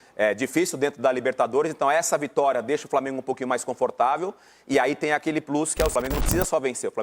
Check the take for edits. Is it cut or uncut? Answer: cut